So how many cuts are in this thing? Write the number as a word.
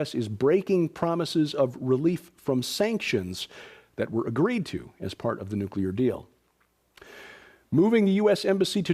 one